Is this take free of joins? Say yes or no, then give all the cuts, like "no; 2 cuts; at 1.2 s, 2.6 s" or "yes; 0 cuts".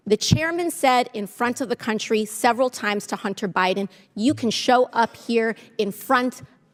yes; 0 cuts